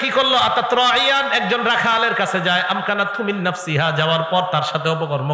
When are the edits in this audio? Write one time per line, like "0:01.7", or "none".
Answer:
none